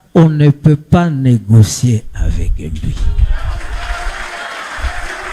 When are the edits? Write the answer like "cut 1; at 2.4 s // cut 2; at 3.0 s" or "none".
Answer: none

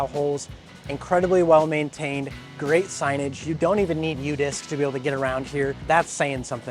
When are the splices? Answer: cut 1; at 5.8 s

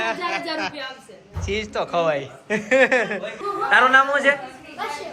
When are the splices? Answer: cut 1; at 3.3 s

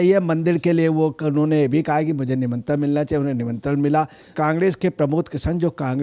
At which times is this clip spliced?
cut 1; at 4.2 s

